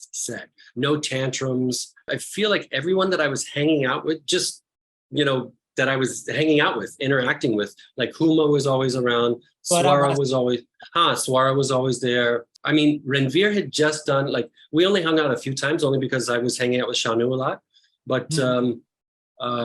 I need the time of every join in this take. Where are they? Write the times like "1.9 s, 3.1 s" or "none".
2.2 s